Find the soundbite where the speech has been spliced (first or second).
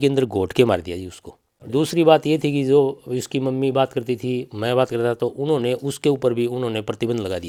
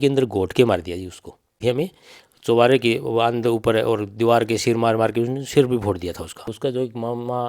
second